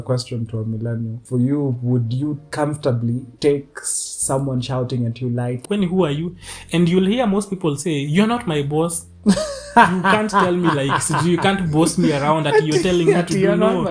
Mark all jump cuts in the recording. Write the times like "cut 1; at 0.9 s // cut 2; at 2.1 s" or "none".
cut 1; at 1.2 s // cut 2; at 2.4 s // cut 3; at 3.3 s // cut 4; at 5.6 s